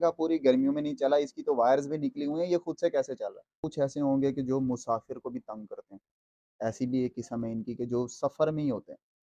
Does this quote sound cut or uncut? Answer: cut